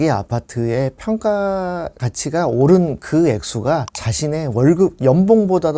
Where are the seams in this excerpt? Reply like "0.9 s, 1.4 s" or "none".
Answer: none